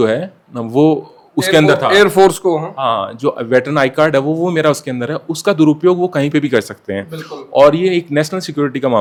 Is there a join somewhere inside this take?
no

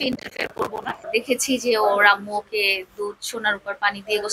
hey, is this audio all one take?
no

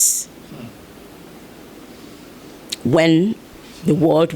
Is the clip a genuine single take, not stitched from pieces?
yes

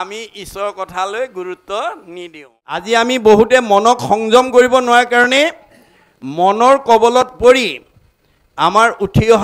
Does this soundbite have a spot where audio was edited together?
yes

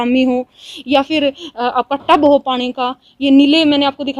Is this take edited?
no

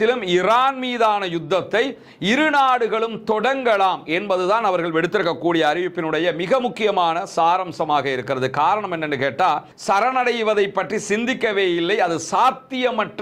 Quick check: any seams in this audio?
yes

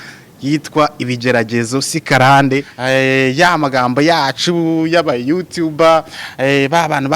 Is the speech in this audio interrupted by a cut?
yes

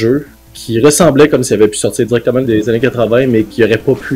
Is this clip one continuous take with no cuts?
no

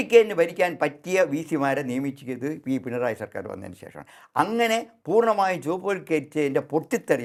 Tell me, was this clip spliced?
no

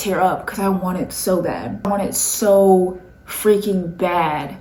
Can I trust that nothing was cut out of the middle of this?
yes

